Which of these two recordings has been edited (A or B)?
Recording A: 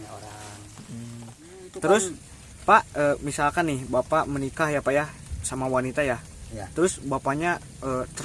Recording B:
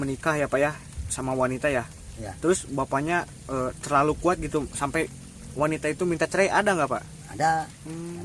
A